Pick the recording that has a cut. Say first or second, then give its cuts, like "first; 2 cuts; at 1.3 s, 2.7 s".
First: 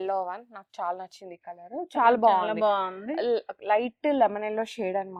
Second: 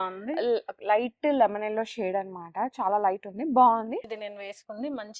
second; 1 cut; at 4.1 s